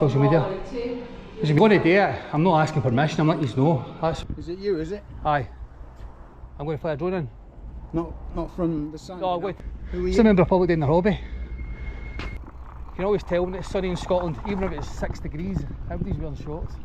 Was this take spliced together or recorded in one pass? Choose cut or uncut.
cut